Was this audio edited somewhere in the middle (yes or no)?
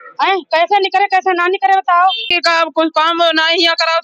yes